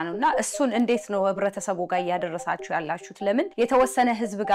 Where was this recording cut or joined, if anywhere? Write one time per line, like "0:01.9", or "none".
0:03.5